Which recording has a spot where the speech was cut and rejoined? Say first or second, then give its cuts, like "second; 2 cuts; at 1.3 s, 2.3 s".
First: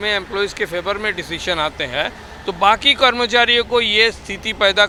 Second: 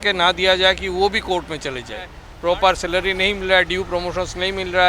second; 1 cut; at 2.2 s